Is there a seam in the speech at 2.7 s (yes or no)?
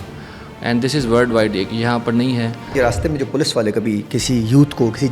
yes